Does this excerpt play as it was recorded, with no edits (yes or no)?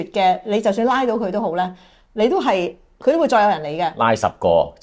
yes